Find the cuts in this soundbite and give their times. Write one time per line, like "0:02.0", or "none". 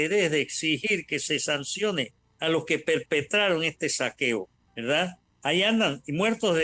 0:02.2
0:05.0